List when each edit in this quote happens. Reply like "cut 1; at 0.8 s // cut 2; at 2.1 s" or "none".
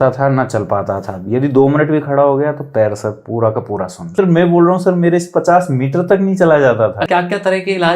cut 1; at 4.1 s // cut 2; at 7.0 s